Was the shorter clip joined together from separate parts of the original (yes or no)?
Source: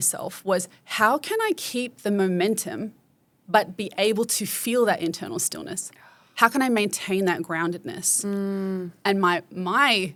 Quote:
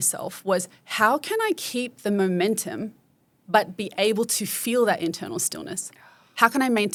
no